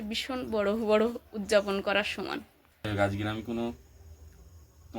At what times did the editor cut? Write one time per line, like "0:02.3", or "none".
0:02.8